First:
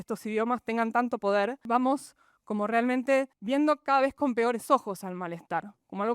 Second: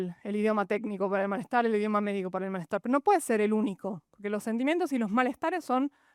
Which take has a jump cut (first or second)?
first